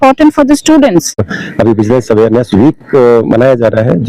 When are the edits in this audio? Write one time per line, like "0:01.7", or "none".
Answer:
0:01.4